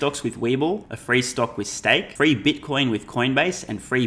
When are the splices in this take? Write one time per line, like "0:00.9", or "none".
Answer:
0:00.9
0:02.1